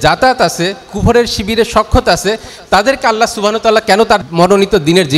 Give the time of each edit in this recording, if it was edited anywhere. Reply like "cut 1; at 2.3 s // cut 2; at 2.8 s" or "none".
cut 1; at 4.3 s